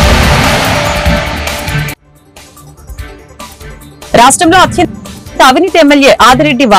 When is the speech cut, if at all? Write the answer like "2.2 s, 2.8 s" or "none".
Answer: none